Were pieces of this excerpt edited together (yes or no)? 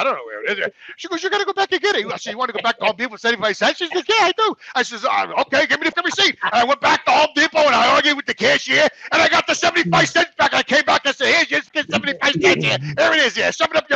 yes